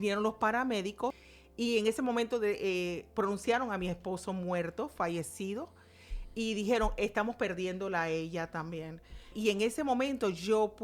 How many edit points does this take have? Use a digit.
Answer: 2